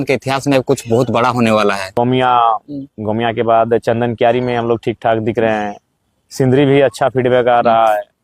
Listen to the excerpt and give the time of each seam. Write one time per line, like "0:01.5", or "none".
0:01.9